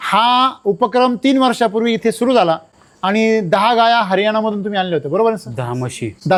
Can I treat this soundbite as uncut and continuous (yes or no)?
yes